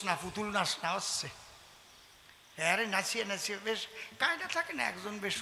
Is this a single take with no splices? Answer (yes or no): yes